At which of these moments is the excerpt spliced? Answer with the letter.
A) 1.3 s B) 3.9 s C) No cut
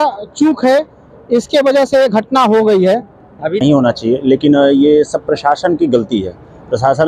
B